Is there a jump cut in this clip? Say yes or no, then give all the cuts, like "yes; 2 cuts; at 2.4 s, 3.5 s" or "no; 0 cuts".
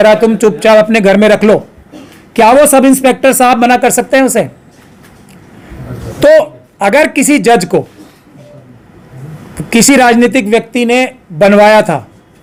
no; 0 cuts